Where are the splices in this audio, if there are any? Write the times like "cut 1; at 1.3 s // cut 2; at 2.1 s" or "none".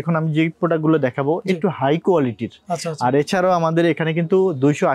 none